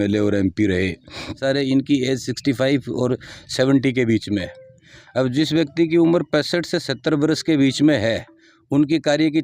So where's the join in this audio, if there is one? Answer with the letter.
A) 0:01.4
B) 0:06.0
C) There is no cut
A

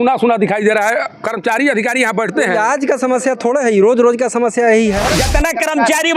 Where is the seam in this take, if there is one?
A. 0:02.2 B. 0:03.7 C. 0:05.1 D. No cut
C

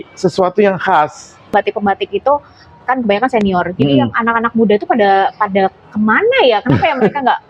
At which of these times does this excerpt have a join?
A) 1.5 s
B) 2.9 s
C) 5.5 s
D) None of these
A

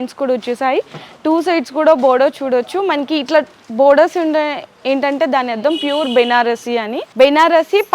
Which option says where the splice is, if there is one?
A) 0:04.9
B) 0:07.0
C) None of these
B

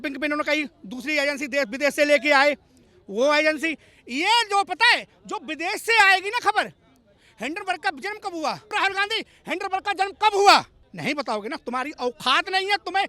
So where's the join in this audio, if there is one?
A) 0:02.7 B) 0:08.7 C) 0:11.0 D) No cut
B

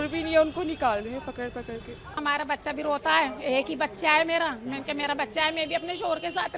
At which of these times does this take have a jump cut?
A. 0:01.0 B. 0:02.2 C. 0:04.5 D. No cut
B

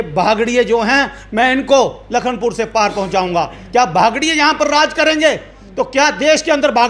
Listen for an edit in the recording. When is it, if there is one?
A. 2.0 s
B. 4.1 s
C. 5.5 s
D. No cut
D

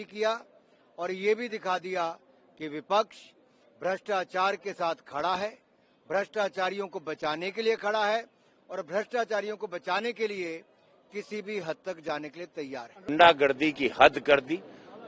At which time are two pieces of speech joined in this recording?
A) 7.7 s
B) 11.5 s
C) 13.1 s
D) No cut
C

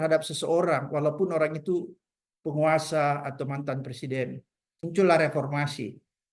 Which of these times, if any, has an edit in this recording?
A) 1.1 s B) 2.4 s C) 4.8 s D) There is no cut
C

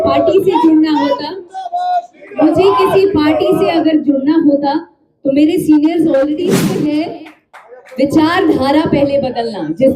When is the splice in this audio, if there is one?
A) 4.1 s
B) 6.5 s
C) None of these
B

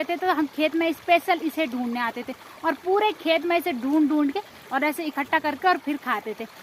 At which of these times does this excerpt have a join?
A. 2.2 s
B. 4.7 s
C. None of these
C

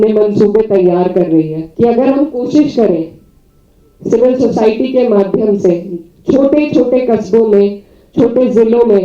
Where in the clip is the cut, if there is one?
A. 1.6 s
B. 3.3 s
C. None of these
A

